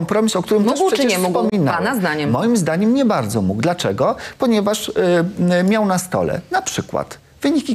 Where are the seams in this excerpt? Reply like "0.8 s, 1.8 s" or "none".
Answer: none